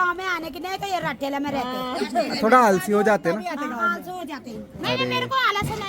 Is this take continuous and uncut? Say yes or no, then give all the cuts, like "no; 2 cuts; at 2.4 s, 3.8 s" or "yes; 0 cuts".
yes; 0 cuts